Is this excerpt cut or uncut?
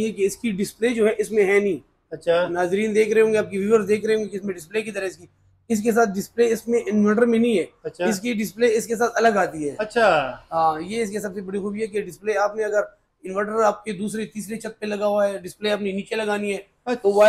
uncut